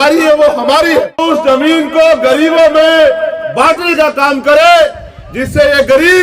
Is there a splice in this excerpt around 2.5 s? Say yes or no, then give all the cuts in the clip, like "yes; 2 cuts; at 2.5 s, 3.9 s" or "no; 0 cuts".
no; 1 cut; at 1.2 s